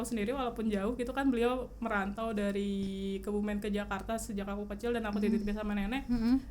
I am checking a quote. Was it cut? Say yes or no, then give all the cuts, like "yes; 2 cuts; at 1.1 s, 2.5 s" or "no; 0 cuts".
no; 0 cuts